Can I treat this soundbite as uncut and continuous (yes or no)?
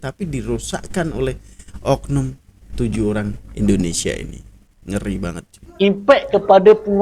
no